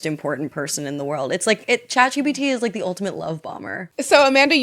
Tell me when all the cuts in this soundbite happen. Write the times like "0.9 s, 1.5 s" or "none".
none

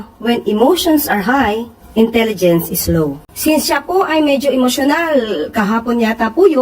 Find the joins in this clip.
3.2 s

